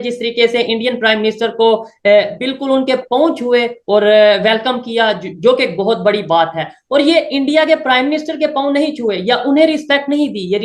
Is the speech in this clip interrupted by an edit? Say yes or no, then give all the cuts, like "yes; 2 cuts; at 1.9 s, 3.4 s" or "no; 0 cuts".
no; 0 cuts